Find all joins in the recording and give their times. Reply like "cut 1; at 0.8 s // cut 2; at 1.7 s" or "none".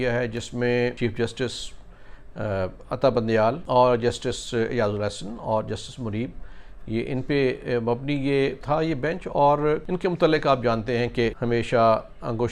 cut 1; at 1.0 s // cut 2; at 3.6 s // cut 3; at 8.6 s // cut 4; at 9.9 s // cut 5; at 11.4 s